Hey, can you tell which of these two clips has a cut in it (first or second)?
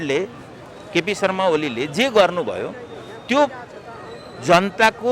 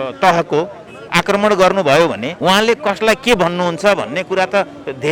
second